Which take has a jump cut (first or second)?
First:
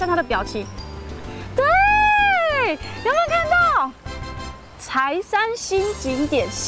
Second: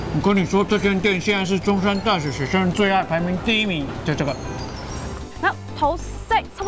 second